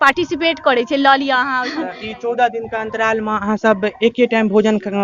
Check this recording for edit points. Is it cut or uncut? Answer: cut